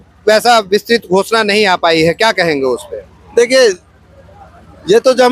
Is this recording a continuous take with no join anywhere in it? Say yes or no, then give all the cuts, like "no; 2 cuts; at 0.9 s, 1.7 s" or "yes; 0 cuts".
yes; 0 cuts